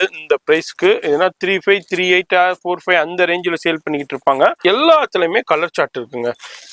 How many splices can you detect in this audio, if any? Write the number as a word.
one